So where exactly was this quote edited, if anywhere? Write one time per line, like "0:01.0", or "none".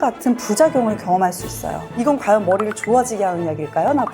0:01.9